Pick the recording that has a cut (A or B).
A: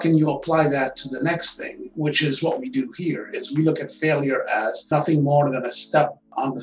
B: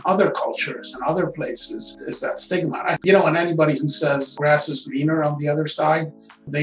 B